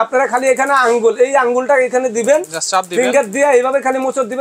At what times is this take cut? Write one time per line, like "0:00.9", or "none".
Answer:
none